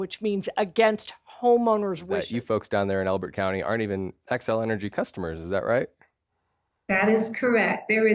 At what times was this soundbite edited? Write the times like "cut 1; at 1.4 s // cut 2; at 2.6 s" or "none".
cut 1; at 2.1 s